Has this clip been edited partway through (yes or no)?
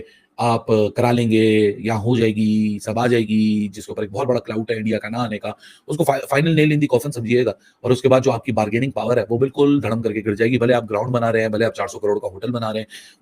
no